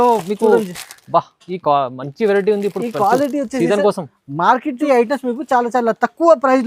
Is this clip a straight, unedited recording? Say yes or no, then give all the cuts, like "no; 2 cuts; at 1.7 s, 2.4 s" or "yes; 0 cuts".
no; 1 cut; at 4.8 s